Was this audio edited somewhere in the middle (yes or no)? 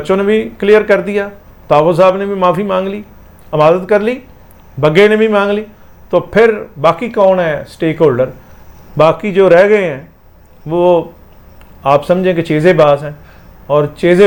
no